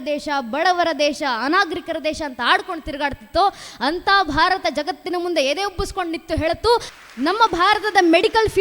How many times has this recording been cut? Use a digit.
1